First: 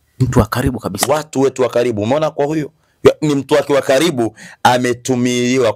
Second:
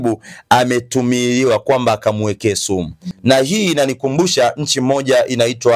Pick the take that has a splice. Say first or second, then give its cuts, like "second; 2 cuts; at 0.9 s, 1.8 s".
second; 1 cut; at 3.0 s